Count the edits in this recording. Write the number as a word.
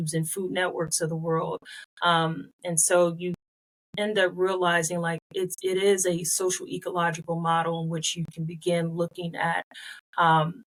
zero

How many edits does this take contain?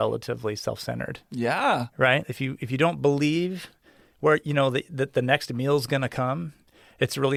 zero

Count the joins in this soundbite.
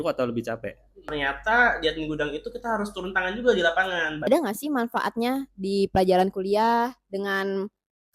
two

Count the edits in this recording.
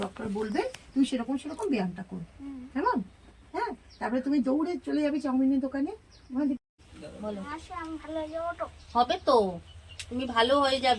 one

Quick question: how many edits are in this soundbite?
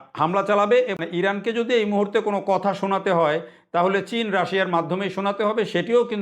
one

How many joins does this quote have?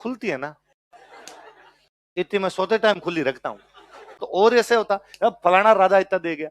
one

